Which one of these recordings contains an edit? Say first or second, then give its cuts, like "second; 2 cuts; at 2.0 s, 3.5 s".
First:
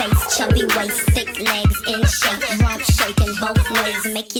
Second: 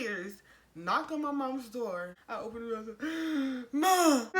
second; 1 cut; at 2.2 s